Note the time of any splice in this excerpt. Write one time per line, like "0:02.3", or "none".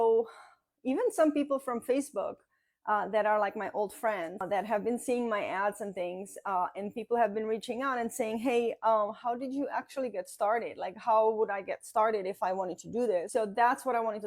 0:04.4
0:13.3